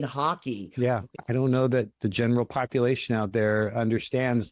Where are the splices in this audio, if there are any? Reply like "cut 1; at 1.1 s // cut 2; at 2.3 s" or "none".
cut 1; at 1.1 s